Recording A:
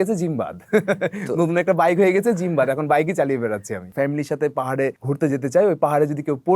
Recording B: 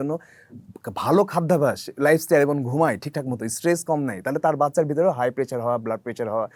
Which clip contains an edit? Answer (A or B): A